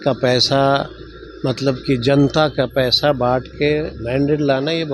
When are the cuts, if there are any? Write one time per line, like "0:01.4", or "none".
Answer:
none